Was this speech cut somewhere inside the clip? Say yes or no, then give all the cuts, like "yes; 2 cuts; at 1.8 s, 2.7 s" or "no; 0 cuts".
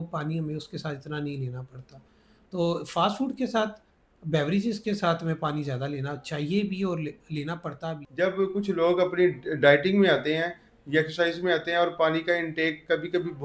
yes; 1 cut; at 8.0 s